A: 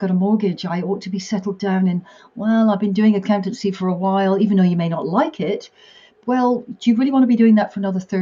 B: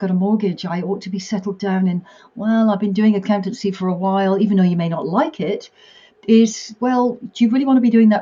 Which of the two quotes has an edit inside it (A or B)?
A